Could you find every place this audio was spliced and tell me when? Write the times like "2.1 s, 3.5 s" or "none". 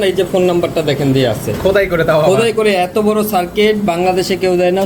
none